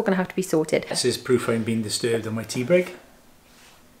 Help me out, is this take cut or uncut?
cut